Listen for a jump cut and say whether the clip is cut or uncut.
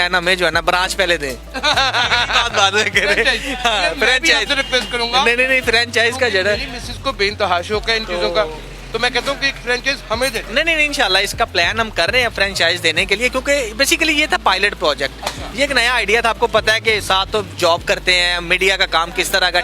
uncut